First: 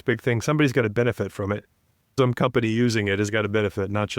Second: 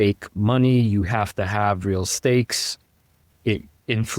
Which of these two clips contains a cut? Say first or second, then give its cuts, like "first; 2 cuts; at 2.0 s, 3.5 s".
first; 1 cut; at 2.1 s